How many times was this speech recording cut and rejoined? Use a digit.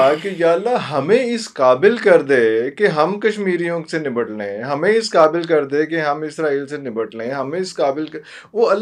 0